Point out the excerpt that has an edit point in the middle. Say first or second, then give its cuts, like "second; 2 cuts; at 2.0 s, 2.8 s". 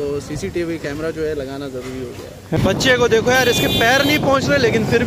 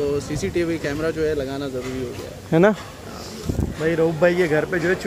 first; 1 cut; at 2.6 s